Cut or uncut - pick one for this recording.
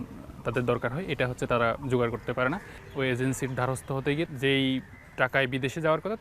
cut